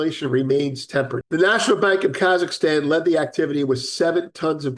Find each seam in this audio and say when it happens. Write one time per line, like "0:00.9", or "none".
0:01.2